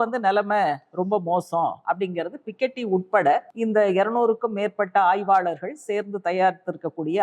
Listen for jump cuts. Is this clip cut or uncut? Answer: cut